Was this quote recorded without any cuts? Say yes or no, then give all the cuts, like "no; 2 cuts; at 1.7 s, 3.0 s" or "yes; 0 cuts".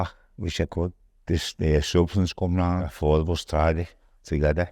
no; 2 cuts; at 1.1 s, 2.9 s